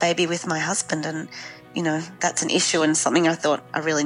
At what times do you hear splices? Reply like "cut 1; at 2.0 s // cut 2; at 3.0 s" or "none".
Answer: none